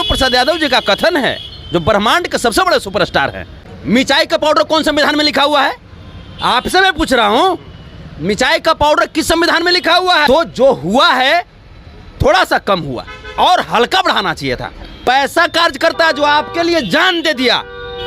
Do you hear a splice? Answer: yes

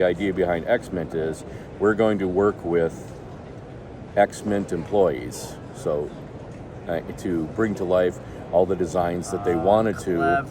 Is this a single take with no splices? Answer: yes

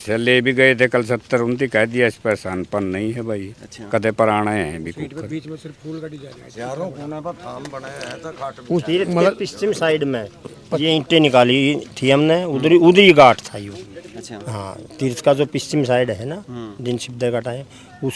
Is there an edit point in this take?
no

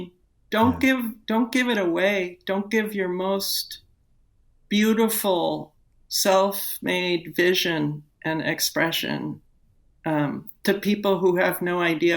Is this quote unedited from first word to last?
yes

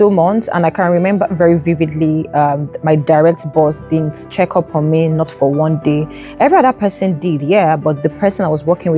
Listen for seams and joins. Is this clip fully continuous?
yes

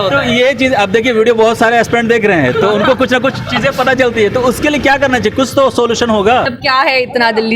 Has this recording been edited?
yes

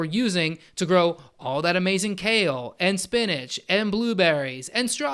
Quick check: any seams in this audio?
no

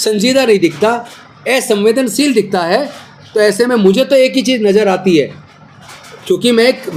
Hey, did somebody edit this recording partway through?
no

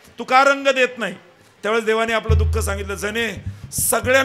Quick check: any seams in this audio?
no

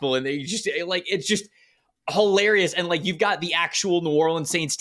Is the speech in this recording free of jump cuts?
yes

